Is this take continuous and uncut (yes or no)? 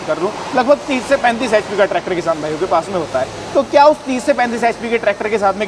yes